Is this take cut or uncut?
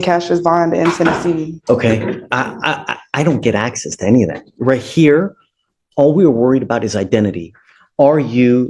cut